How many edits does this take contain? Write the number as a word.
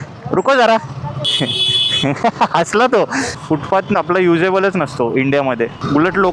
two